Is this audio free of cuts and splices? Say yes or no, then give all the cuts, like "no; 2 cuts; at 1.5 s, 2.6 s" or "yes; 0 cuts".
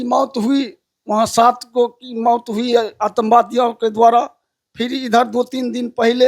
yes; 0 cuts